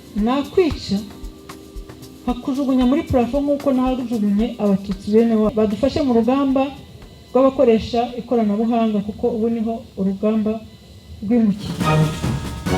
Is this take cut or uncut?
cut